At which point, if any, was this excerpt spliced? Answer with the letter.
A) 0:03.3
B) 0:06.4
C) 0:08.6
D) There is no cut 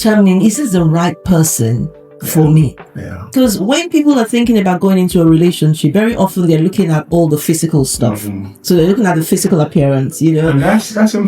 A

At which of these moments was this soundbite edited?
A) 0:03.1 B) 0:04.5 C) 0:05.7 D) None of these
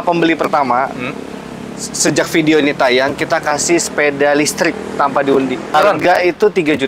C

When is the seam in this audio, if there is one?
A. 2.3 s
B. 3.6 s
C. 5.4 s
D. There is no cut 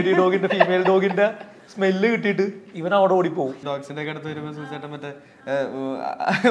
B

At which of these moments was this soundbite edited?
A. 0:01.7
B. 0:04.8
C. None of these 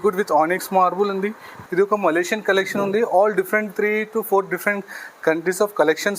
A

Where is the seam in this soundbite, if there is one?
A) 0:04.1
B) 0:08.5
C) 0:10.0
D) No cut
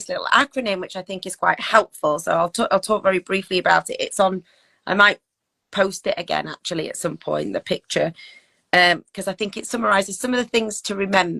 B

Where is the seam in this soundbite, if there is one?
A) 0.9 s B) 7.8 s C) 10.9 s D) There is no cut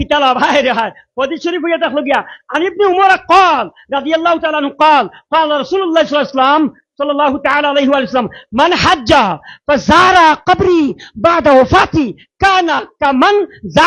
D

